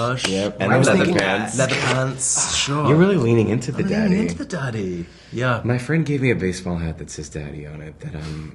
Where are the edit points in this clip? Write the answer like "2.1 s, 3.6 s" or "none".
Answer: none